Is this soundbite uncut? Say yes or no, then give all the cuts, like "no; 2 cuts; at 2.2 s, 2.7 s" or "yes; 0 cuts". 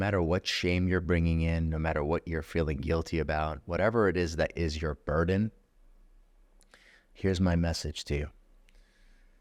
yes; 0 cuts